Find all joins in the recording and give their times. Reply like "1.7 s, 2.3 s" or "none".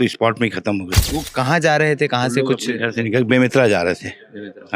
0.9 s